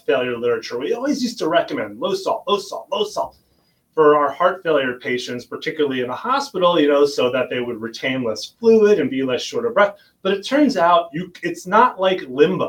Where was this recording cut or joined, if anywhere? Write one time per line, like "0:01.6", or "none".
none